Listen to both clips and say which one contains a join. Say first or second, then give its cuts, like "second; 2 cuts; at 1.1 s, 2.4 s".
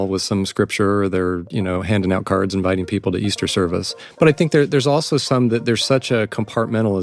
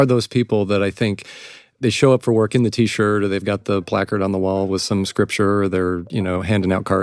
first; 1 cut; at 3.9 s